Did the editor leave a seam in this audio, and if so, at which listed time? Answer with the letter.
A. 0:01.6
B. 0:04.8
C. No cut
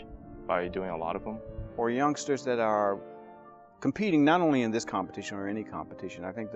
A